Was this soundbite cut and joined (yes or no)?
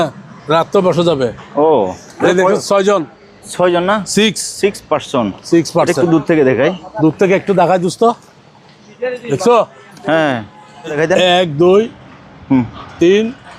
yes